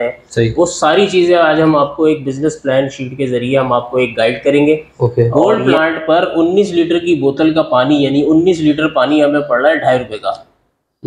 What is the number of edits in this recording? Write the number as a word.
one